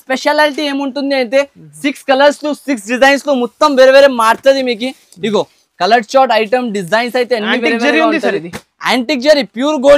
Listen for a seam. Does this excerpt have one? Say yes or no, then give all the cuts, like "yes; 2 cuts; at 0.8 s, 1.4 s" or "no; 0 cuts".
no; 0 cuts